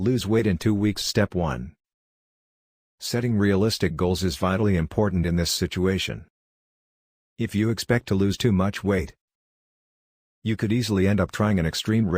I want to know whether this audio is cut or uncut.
cut